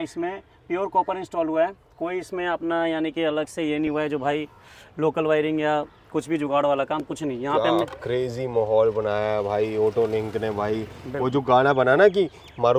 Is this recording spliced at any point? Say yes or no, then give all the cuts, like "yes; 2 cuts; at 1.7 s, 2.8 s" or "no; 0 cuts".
no; 0 cuts